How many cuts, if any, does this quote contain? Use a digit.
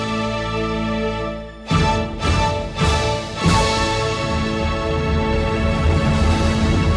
0